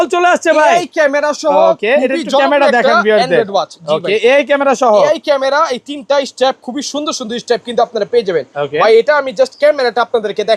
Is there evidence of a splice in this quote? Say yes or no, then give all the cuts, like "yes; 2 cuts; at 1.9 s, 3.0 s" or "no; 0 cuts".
no; 0 cuts